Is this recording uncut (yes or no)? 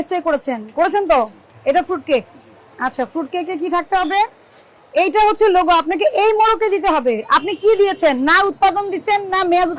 no